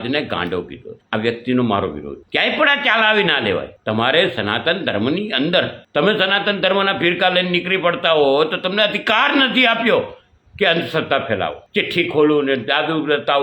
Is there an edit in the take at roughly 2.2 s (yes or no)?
no